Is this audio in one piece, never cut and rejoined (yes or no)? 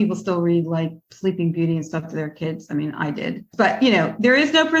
yes